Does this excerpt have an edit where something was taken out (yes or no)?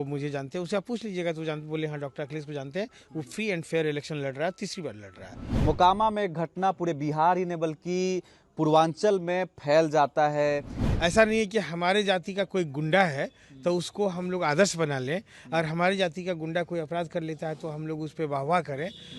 yes